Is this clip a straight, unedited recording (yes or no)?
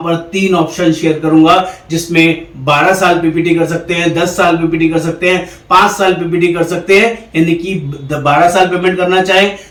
yes